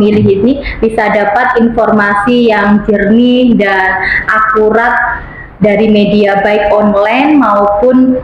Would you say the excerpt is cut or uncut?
uncut